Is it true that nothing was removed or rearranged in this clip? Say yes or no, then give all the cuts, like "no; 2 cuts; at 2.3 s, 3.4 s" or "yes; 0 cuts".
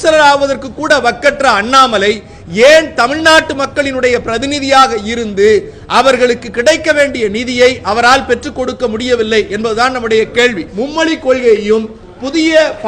no; 1 cut; at 10.7 s